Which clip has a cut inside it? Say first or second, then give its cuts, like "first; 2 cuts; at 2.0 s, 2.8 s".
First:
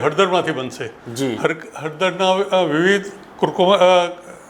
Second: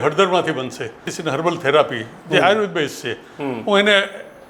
second; 1 cut; at 1.1 s